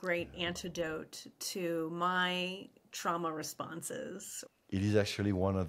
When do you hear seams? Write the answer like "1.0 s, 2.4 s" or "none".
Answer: 4.3 s